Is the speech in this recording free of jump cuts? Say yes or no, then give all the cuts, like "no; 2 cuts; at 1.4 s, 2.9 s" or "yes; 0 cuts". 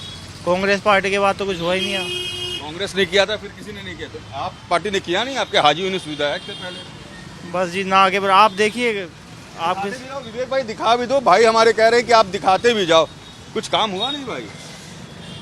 yes; 0 cuts